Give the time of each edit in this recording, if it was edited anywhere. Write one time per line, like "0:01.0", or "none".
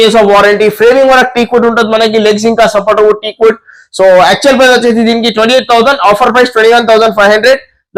none